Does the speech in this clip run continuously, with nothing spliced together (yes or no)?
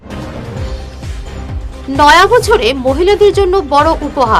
no